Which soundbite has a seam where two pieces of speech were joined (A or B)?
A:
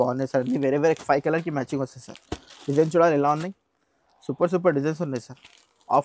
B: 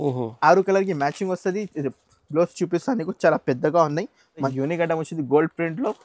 B